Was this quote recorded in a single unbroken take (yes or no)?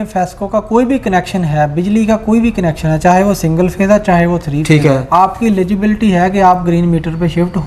yes